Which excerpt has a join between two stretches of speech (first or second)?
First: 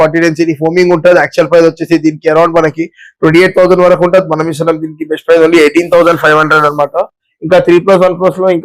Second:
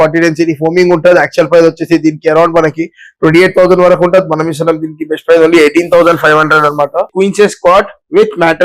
second